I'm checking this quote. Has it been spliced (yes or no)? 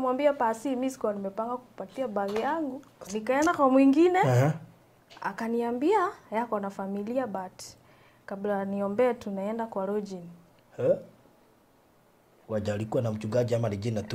yes